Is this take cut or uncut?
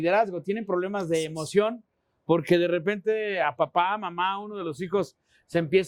uncut